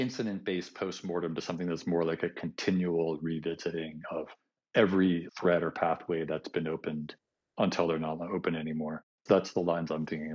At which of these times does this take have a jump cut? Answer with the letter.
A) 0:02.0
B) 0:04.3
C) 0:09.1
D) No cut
C